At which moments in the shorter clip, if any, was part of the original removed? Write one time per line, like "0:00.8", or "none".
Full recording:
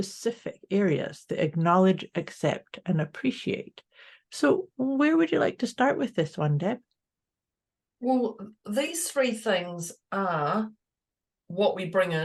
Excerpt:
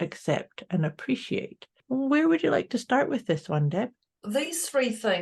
0:01.8
0:04.1